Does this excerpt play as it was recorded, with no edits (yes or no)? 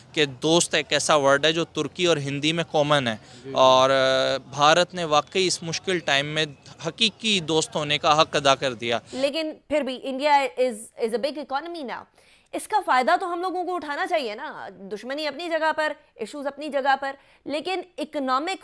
no